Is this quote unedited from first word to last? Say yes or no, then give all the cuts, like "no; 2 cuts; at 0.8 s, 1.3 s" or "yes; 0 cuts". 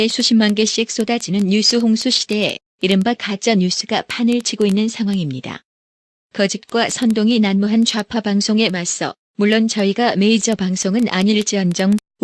no; 1 cut; at 9.6 s